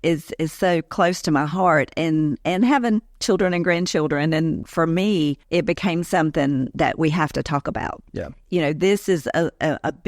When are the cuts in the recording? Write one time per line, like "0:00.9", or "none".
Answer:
0:04.6
0:08.4